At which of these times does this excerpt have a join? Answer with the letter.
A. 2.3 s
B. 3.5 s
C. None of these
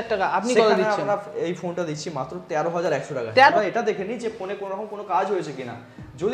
B